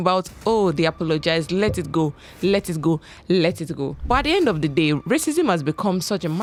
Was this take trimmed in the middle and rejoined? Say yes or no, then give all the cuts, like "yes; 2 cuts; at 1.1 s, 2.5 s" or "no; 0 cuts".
no; 0 cuts